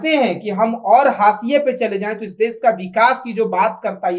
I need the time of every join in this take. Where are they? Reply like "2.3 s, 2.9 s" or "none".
none